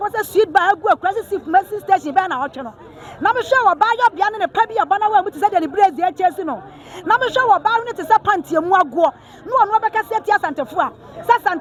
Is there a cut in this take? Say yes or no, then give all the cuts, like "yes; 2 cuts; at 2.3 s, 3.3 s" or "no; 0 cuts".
no; 0 cuts